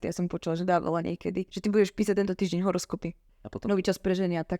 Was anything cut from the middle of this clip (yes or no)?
yes